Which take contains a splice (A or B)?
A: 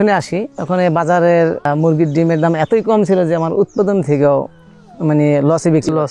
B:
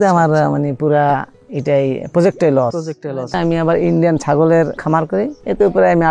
B